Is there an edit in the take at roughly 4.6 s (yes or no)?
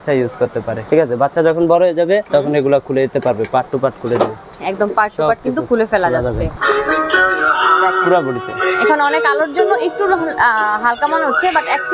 yes